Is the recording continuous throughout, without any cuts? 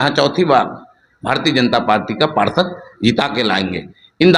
yes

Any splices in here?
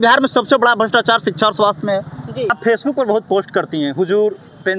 yes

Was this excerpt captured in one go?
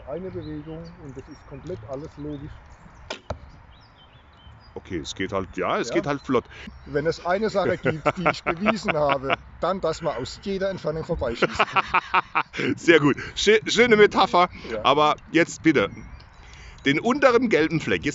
no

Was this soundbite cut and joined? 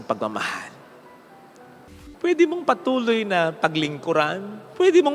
yes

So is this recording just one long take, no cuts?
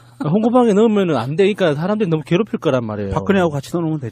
yes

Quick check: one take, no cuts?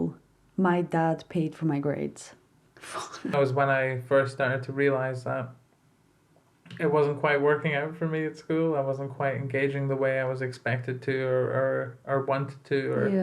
no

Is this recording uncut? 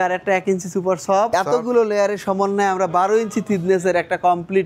no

